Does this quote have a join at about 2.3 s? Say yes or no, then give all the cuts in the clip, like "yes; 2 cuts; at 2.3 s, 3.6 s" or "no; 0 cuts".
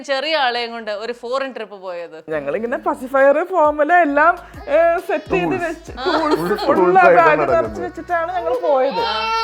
yes; 1 cut; at 2.3 s